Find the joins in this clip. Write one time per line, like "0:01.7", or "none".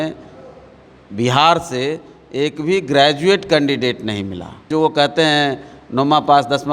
0:04.7

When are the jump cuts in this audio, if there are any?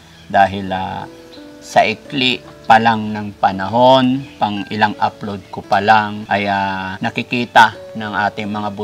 0:04.3
0:06.2
0:06.9

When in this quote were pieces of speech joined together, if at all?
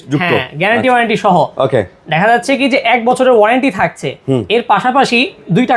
none

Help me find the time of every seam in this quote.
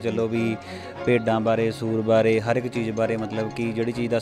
none

